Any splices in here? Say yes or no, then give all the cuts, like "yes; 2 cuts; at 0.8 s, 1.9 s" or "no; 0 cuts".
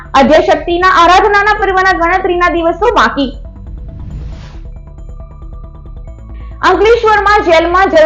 no; 0 cuts